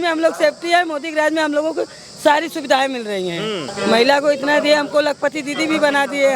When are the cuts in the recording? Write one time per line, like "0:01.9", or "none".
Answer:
0:03.7

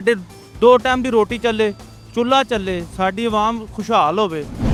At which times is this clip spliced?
none

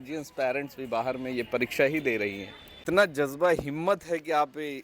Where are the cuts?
0:02.7

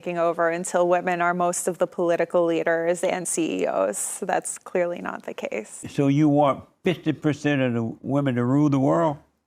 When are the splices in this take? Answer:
0:05.9

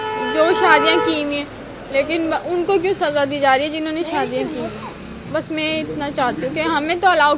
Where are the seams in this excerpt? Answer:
none

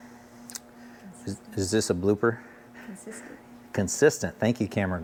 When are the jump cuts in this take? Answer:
none

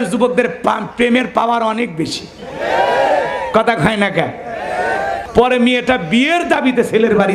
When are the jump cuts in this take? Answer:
0:05.1

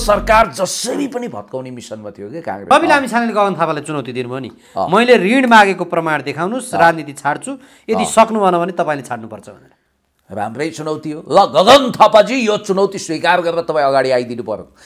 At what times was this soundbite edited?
0:02.7

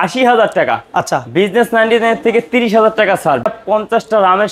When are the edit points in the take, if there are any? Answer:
0:03.5

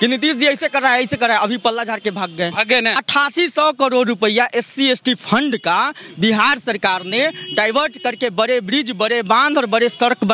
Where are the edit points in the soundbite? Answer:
0:03.0

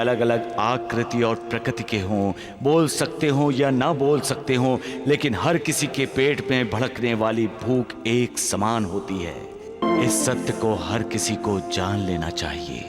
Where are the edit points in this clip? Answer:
0:09.8

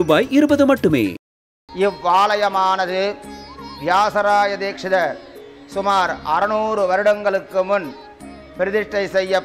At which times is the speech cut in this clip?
0:01.5

